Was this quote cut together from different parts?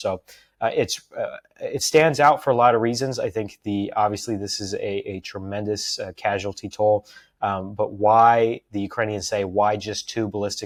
no; 0 cuts

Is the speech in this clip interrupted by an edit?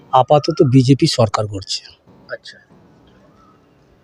no; 0 cuts

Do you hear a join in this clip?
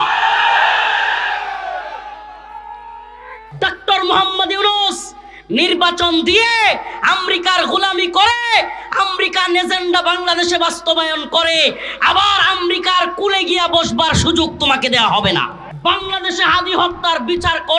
yes; 2 cuts; at 3.4 s, 15.6 s

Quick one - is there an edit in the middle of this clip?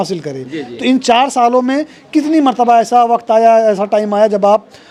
no; 0 cuts

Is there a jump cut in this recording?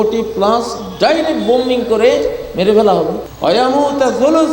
yes; 1 cut; at 3.3 s

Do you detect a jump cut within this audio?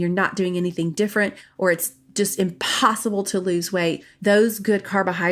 yes; 1 cut; at 4.1 s

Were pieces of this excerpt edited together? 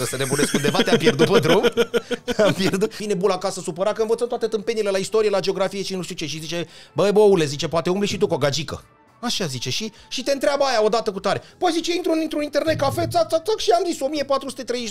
yes; 1 cut; at 3.0 s

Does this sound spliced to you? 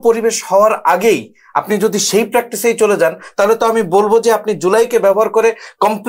no; 0 cuts

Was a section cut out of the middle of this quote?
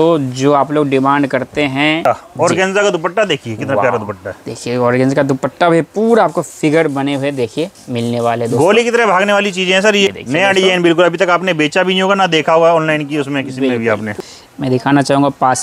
yes; 3 cuts; at 2.0 s, 10.1 s, 14.1 s

